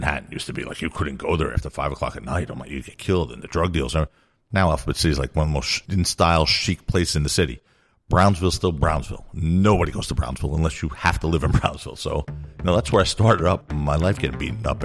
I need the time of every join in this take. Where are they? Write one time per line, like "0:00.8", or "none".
0:05.8
0:13.7